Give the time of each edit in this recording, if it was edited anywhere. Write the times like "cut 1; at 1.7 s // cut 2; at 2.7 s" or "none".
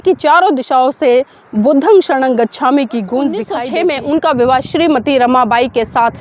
cut 1; at 3.5 s